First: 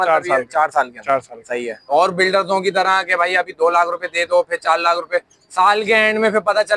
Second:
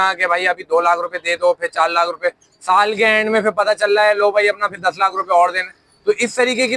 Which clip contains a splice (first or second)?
first